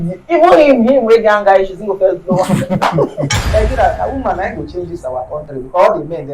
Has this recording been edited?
yes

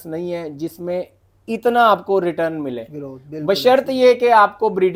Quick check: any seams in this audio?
no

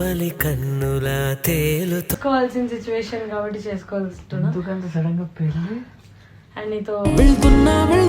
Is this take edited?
yes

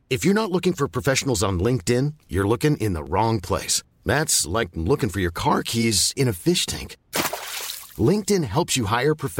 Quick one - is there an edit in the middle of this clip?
no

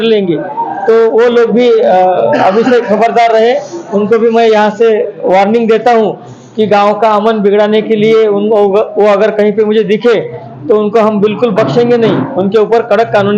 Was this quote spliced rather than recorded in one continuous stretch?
no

